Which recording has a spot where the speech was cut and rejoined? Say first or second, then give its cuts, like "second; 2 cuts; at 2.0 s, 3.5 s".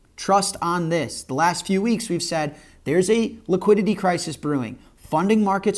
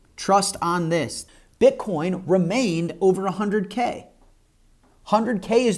second; 1 cut; at 1.2 s